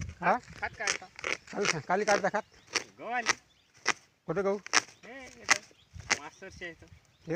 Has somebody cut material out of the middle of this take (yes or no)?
no